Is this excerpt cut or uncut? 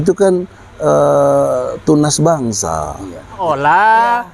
cut